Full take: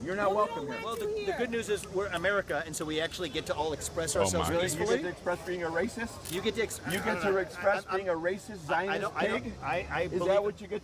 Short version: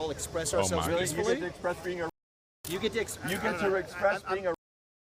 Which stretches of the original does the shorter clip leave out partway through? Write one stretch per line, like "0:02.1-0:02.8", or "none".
none